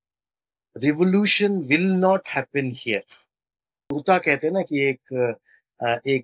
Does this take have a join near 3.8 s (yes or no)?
yes